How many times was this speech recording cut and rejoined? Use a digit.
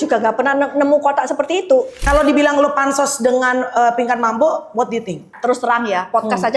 2